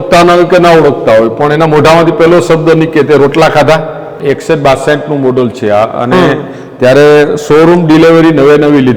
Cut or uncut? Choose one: cut